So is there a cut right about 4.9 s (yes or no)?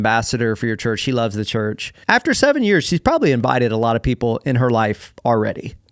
no